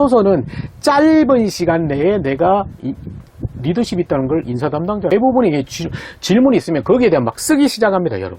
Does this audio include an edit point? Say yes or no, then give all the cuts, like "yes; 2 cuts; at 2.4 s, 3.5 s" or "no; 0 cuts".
yes; 1 cut; at 5.1 s